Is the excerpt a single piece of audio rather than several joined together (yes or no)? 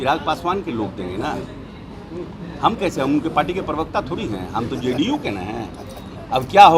yes